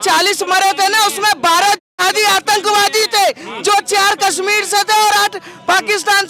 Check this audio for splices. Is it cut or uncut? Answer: uncut